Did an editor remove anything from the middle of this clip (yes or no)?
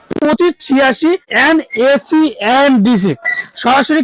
yes